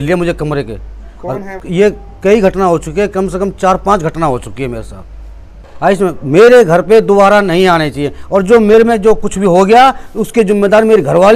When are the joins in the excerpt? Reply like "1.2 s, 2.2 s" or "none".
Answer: 1.6 s, 5.7 s